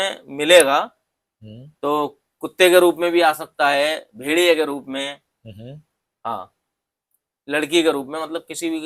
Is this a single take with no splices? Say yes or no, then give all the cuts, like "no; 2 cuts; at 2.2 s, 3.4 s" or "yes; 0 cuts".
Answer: yes; 0 cuts